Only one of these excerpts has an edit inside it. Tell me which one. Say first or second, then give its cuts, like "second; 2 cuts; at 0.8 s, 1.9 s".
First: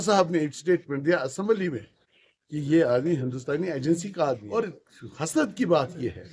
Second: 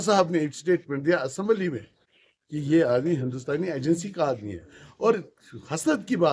first; 1 cut; at 4.5 s